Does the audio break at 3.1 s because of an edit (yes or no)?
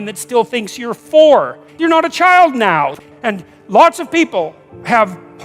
yes